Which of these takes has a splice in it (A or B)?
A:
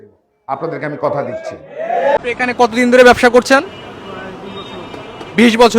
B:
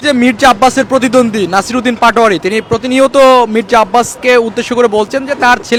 A